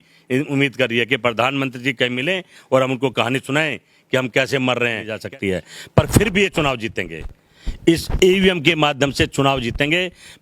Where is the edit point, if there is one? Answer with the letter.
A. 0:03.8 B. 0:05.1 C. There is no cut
B